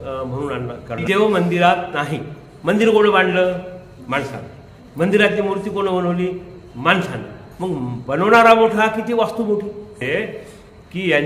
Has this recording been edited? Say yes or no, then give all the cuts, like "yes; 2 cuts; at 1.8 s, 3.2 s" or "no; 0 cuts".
yes; 2 cuts; at 1.0 s, 10.0 s